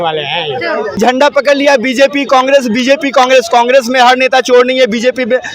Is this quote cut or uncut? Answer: cut